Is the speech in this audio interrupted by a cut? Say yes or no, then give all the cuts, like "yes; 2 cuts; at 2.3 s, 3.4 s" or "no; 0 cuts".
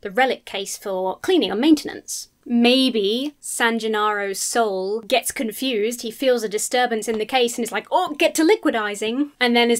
yes; 2 cuts; at 3.4 s, 5.0 s